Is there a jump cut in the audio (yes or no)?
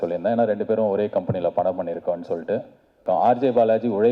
yes